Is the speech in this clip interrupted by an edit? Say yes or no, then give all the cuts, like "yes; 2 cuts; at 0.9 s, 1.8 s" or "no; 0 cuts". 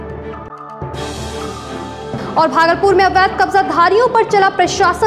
no; 0 cuts